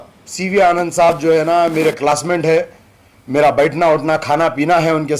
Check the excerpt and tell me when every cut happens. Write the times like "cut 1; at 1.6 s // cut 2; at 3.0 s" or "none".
none